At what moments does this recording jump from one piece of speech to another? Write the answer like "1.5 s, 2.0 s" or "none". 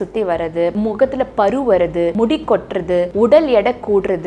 0.7 s, 2.1 s, 3.1 s